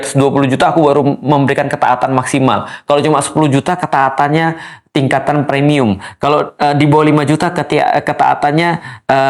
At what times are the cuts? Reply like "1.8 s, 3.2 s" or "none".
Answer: none